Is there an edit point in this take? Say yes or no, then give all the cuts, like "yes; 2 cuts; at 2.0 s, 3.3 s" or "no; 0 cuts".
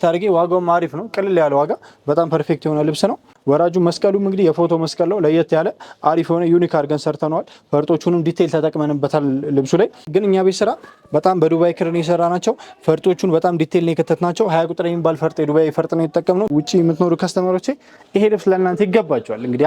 yes; 3 cuts; at 3.3 s, 10.0 s, 16.5 s